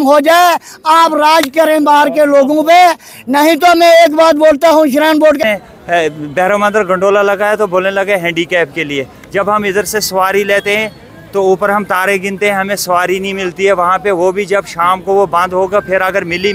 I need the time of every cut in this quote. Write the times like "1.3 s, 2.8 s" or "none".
5.4 s